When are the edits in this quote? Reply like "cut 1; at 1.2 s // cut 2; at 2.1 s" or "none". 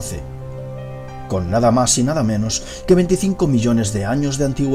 none